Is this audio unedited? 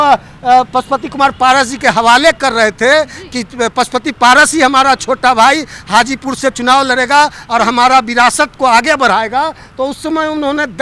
yes; 0 cuts

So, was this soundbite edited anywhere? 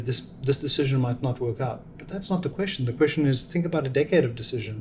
no; 0 cuts

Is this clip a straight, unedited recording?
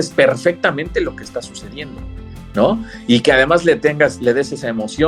yes; 0 cuts

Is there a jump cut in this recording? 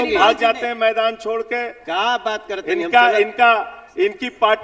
no; 0 cuts

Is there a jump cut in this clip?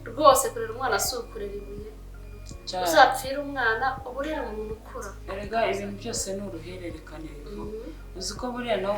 yes; 1 cut; at 5.2 s

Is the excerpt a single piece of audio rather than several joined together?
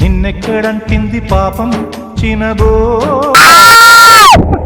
no; 1 cut; at 3.4 s

